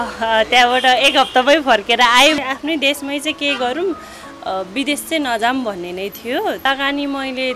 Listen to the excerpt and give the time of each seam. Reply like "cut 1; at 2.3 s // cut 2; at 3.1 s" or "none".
cut 1; at 2.4 s // cut 2; at 6.6 s